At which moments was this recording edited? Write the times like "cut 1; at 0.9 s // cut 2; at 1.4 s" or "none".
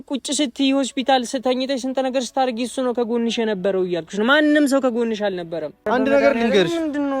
cut 1; at 5.8 s